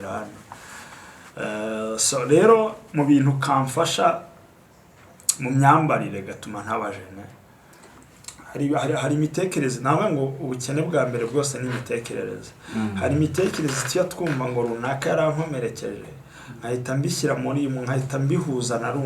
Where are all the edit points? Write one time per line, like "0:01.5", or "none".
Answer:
0:07.9